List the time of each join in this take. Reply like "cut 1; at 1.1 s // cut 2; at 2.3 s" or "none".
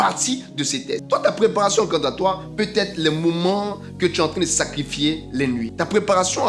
cut 1; at 1.0 s // cut 2; at 5.7 s